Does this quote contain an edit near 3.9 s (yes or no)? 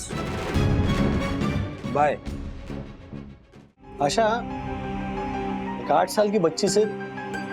yes